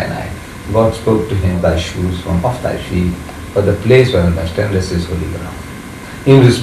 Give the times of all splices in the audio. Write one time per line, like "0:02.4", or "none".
0:01.6